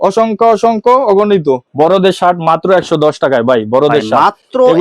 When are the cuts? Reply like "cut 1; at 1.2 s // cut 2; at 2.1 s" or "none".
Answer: cut 1; at 1.7 s